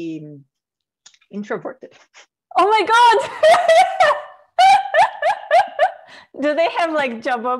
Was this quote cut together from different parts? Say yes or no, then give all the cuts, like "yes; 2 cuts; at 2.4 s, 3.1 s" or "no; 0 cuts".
no; 0 cuts